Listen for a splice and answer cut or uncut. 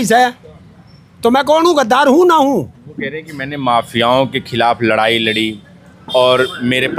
uncut